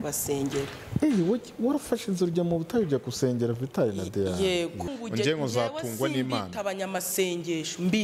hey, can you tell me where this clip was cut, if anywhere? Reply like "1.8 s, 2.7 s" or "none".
4.9 s